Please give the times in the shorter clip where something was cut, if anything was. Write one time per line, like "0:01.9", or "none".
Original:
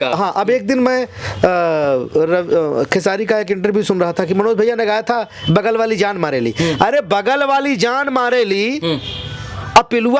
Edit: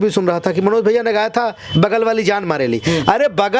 none